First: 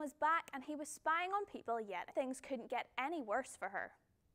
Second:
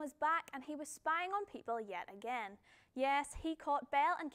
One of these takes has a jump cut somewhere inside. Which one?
second; 1 cut; at 2.1 s

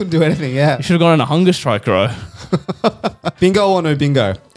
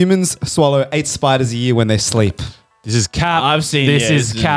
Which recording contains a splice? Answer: first; 1 cut; at 3.2 s

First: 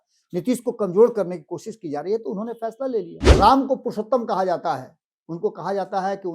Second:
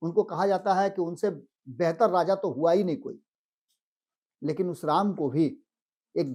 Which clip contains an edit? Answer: first; 1 cut; at 3.2 s

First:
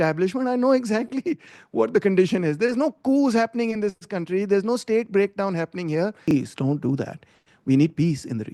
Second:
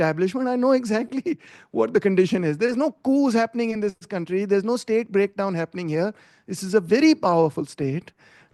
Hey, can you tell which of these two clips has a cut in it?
first; 1 cut; at 6.3 s

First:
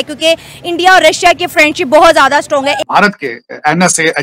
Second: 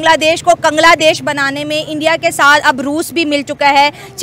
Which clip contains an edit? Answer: first; 1 cut; at 2.8 s

